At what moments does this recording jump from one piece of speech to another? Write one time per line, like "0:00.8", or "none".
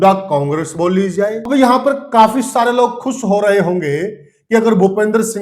0:01.5